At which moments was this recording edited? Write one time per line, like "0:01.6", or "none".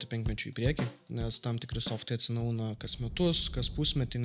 none

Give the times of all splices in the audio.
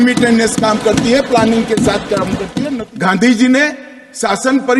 0:02.6

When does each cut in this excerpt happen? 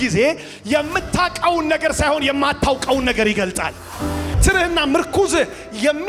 0:04.4

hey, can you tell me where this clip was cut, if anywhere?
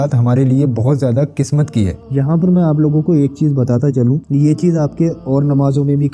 0:02.0

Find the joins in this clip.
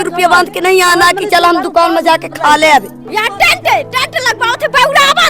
0:03.1

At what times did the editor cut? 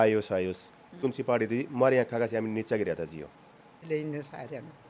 0:01.0
0:03.8

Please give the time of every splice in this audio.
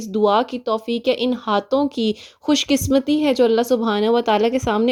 none

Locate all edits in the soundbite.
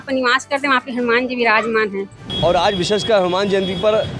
0:02.2

